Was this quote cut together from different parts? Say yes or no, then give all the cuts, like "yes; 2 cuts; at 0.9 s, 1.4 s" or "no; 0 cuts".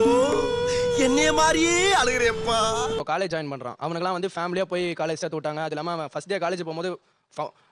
yes; 1 cut; at 3.0 s